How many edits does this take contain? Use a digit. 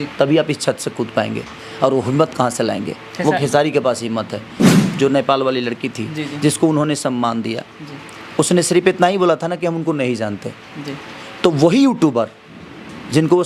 1